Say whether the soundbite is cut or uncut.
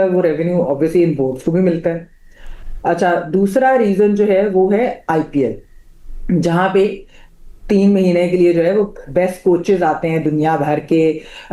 uncut